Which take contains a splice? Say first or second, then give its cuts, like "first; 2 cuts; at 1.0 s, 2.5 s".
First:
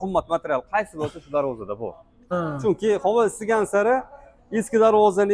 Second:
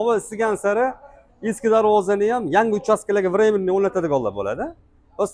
first; 1 cut; at 2.1 s